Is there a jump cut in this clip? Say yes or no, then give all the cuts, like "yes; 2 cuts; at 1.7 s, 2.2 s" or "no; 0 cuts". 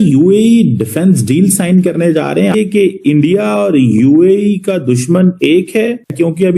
yes; 1 cut; at 2.5 s